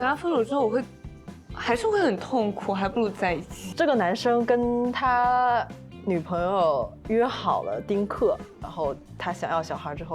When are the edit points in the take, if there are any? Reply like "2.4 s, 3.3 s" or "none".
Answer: 3.6 s, 8.6 s